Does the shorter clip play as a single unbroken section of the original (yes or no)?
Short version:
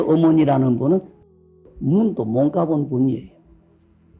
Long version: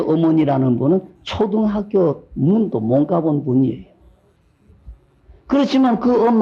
no